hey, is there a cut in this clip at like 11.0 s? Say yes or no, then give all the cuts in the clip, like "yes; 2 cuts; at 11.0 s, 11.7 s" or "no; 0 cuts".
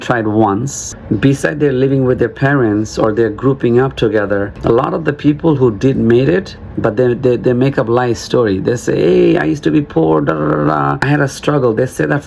yes; 3 cuts; at 0.9 s, 4.6 s, 11.0 s